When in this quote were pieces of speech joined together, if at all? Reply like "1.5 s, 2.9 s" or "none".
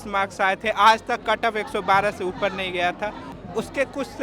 3.3 s